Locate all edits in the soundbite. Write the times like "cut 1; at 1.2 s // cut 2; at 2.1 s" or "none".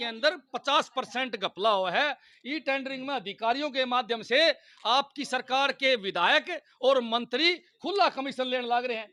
none